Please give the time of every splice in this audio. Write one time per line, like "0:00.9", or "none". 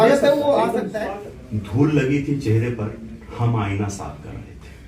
0:01.0